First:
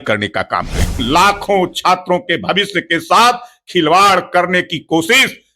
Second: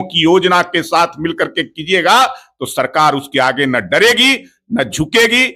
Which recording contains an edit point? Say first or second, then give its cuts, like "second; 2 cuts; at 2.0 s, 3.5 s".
first; 1 cut; at 1.0 s